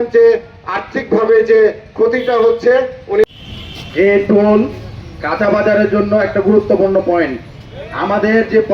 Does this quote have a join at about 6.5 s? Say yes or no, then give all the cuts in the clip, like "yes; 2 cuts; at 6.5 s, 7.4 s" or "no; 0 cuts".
no; 1 cut; at 3.4 s